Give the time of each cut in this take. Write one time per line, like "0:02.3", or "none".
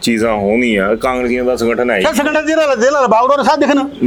none